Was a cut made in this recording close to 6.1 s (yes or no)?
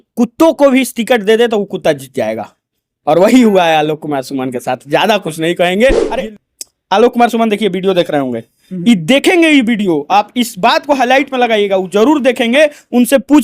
yes